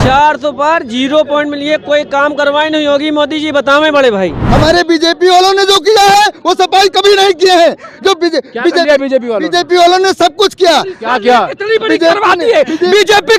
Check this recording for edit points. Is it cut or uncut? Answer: cut